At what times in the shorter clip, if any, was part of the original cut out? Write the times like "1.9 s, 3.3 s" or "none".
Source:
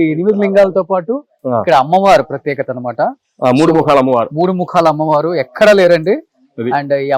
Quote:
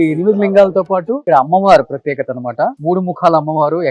1.2 s, 2.8 s